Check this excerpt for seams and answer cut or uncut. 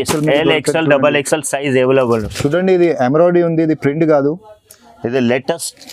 cut